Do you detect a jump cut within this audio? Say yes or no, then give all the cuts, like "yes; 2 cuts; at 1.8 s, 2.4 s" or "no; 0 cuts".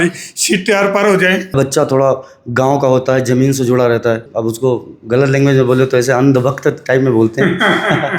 yes; 2 cuts; at 1.5 s, 4.3 s